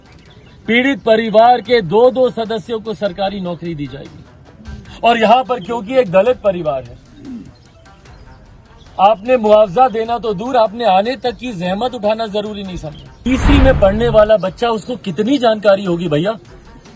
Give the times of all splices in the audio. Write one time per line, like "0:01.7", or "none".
0:13.0